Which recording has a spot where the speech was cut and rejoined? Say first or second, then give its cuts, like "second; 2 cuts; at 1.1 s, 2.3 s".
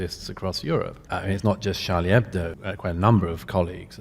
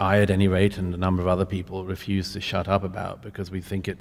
first; 2 cuts; at 1.0 s, 2.5 s